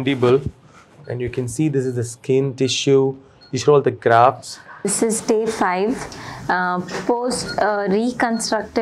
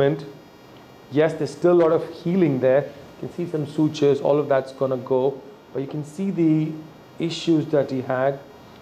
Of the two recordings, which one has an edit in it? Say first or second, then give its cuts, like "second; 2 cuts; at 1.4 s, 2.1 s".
first; 1 cut; at 4.9 s